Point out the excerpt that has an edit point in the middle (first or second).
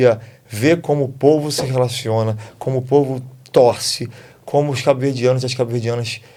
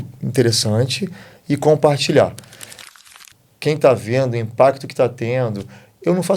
second